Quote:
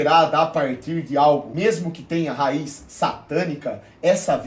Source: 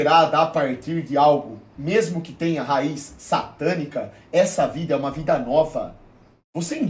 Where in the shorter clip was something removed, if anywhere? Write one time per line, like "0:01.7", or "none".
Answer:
0:01.5